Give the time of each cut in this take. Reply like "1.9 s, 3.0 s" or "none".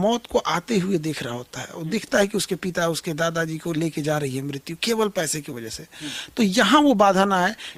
none